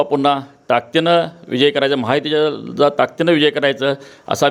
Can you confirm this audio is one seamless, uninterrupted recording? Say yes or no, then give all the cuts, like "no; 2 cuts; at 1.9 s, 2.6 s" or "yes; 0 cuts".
yes; 0 cuts